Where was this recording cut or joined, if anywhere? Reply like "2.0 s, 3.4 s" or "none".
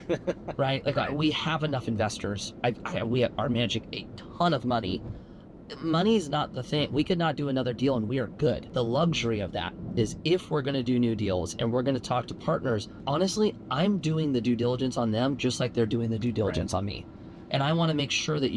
none